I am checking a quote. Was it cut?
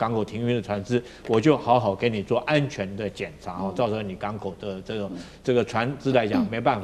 no; 0 cuts

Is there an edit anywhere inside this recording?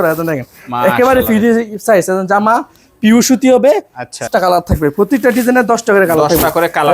yes; 1 cut; at 4.3 s

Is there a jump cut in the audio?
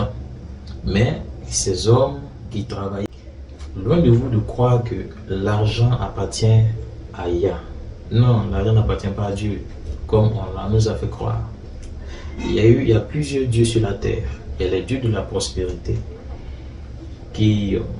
yes; 1 cut; at 3.0 s

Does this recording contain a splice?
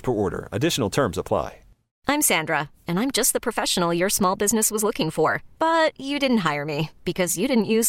yes; 1 cut; at 2.0 s

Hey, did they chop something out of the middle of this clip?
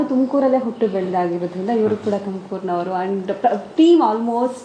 no; 0 cuts

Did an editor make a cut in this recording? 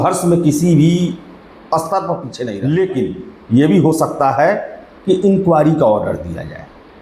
yes; 1 cut; at 2.3 s

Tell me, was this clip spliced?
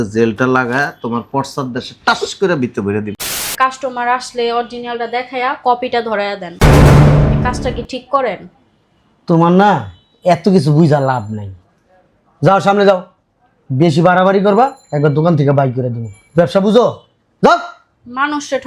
yes; 1 cut; at 3.5 s

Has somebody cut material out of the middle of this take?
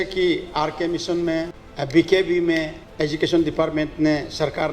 yes; 2 cuts; at 1.6 s, 2.8 s

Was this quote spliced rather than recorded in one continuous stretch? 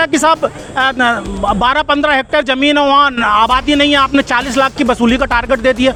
no; 0 cuts

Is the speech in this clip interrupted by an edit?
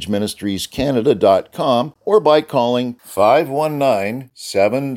yes; 1 cut; at 1.9 s

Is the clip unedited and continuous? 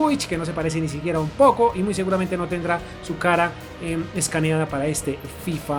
yes; 0 cuts

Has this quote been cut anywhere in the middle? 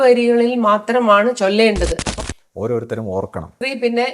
yes; 1 cut; at 2.1 s

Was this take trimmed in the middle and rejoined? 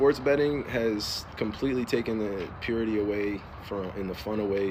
no; 0 cuts

